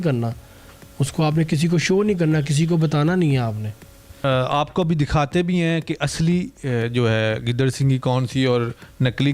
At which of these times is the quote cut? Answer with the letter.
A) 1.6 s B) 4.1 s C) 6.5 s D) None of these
B